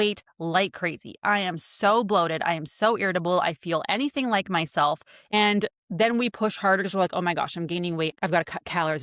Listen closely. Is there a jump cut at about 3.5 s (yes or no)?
no